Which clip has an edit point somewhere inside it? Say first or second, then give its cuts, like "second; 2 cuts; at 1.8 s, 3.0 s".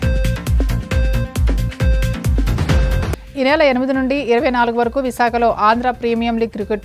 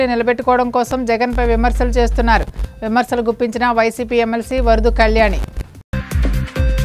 first; 1 cut; at 0.9 s